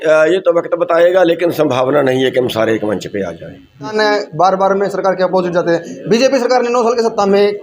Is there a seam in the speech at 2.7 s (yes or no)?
no